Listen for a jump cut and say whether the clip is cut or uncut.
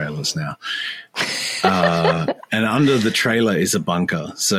uncut